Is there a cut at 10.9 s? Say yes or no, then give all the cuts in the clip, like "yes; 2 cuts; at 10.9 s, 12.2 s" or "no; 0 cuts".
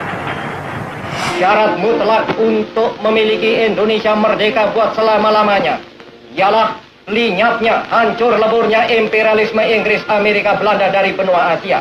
no; 1 cut; at 1.2 s